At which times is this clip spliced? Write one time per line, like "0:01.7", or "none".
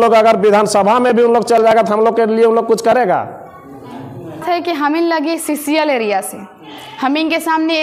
0:04.4